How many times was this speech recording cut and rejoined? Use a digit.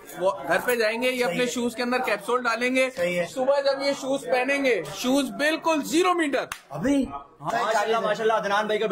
1